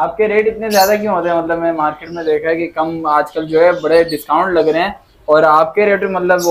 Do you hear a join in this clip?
no; 0 cuts

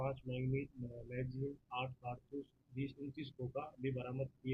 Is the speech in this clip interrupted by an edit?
no; 0 cuts

